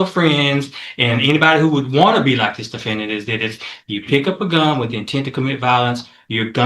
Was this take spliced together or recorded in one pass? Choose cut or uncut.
uncut